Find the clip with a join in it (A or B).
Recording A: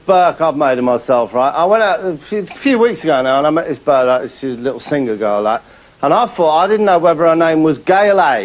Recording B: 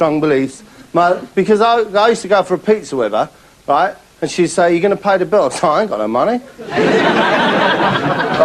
B